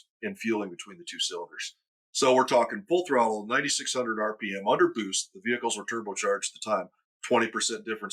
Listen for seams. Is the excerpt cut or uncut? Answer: uncut